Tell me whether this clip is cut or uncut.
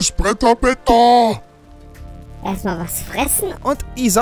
cut